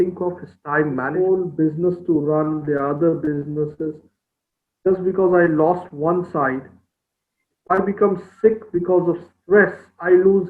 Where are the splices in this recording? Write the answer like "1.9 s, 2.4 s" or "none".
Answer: 1.1 s